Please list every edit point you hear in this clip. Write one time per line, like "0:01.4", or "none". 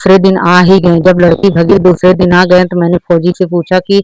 none